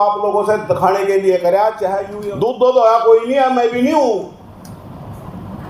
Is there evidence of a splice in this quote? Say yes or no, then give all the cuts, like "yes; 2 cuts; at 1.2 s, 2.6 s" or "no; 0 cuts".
yes; 1 cut; at 2.1 s